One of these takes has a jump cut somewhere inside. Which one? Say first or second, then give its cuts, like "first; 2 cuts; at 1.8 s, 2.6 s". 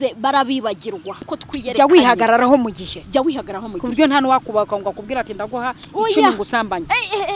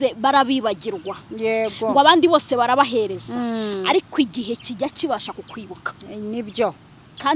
first; 1 cut; at 1.3 s